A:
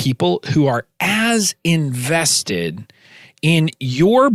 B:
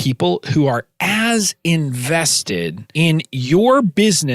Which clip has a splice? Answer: B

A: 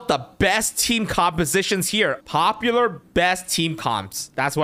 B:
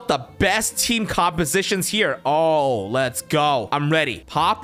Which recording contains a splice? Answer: A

